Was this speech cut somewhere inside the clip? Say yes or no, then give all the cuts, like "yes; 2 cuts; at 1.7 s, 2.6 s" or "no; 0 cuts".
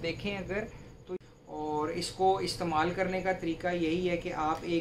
yes; 1 cut; at 1.2 s